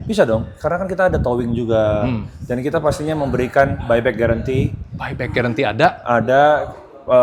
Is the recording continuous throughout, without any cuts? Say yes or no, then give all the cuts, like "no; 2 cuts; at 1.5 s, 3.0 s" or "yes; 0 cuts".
yes; 0 cuts